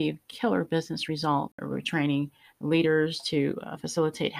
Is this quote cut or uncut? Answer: cut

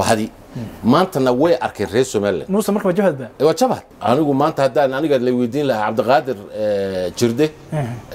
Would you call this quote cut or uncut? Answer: cut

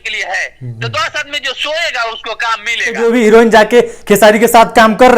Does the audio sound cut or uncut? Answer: cut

